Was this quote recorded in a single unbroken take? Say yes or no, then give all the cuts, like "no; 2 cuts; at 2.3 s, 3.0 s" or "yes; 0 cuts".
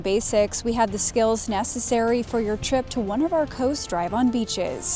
yes; 0 cuts